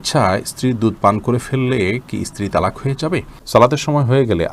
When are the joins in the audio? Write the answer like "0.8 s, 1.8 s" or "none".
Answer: 3.3 s